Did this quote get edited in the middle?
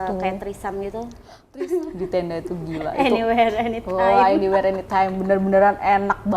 yes; 1 cut; at 1.4 s

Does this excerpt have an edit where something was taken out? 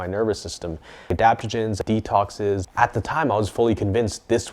yes; 3 cuts; at 1.0 s, 1.8 s, 2.7 s

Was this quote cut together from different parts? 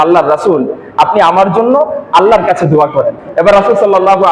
yes; 1 cut; at 3.2 s

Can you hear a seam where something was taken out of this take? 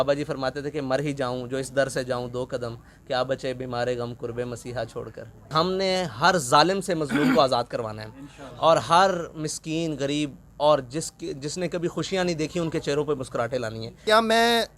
yes; 2 cuts; at 5.5 s, 14.0 s

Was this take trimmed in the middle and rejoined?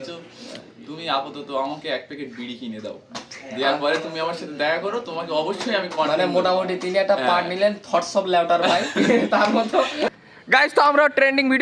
yes; 1 cut; at 10.3 s

